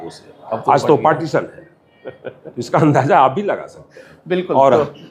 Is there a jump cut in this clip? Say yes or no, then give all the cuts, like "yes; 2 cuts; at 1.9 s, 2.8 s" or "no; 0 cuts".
no; 0 cuts